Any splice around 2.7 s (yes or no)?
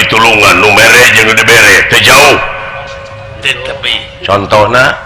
no